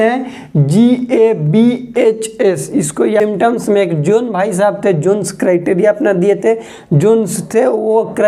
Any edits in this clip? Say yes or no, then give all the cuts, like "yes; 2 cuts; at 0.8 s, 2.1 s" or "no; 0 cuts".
yes; 1 cut; at 3.2 s